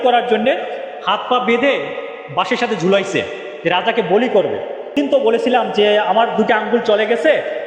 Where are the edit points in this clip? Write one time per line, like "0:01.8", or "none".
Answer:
0:04.9

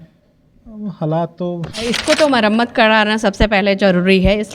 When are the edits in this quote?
0:01.8

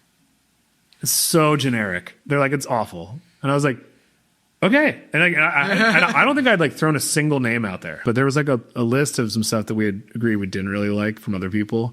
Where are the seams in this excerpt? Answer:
0:08.0

